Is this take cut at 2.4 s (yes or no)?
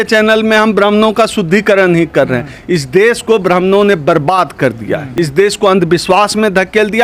no